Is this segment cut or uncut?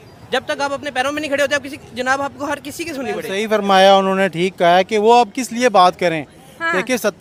uncut